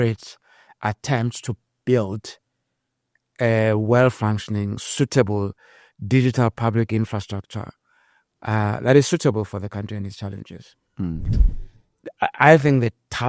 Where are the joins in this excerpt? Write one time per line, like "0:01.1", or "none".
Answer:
0:11.4